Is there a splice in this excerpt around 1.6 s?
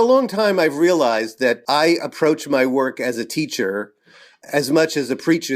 yes; 1 cut; at 1.6 s

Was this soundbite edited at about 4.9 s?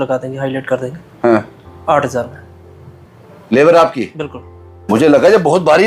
yes; 1 cut; at 4.9 s

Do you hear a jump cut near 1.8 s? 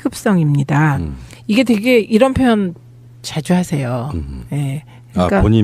yes; 1 cut; at 1.8 s

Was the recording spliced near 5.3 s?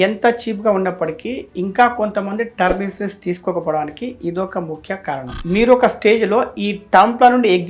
yes; 1 cut; at 5.3 s

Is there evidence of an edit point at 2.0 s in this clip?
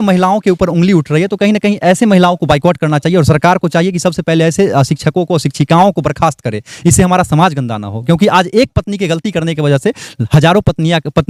no; 0 cuts

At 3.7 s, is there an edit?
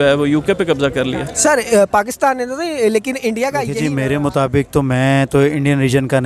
yes; 1 cut; at 3.7 s

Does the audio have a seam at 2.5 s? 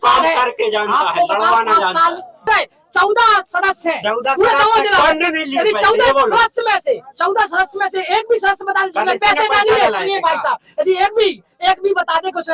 yes; 1 cut; at 2.5 s

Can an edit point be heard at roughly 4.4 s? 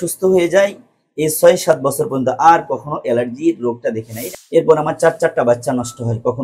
yes; 1 cut; at 4.4 s

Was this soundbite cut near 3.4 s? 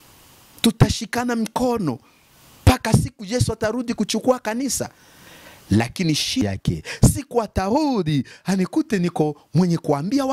no; 1 cut; at 6.4 s

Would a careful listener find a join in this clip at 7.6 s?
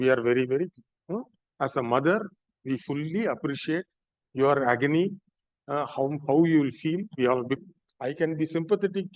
yes; 1 cut; at 7.6 s

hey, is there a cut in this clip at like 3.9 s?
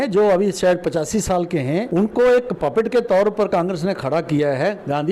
no; 1 cut; at 1.9 s

